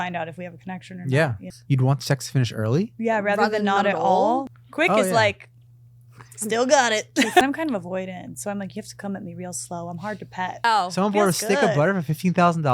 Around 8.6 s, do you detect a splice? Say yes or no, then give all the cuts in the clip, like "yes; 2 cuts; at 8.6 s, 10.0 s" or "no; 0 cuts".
no; 4 cuts; at 1.5 s, 4.4 s, 7.4 s, 10.6 s